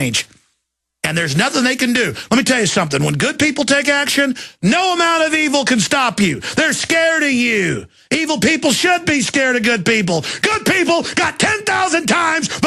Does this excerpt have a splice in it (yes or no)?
no